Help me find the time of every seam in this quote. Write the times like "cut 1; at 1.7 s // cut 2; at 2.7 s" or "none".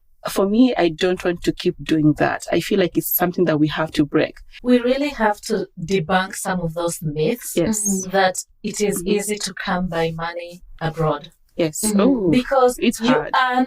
cut 1; at 4.5 s